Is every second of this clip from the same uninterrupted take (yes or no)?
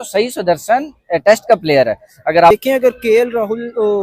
no